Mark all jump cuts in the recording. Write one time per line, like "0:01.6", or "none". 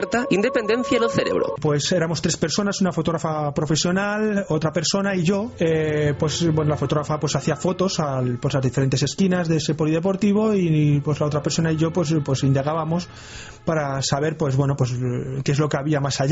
0:01.5

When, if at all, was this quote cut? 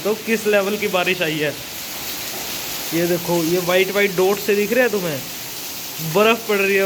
none

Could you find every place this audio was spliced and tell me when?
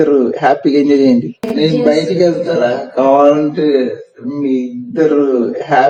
none

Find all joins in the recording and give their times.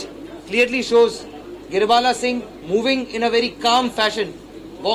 none

